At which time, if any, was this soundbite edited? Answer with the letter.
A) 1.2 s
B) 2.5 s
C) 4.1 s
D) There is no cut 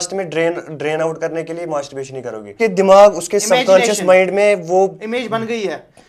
B